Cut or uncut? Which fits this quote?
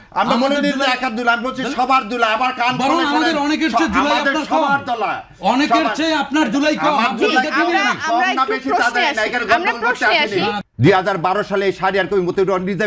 cut